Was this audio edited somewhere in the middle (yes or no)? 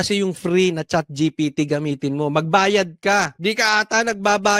yes